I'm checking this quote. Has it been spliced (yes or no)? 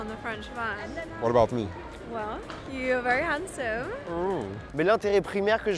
yes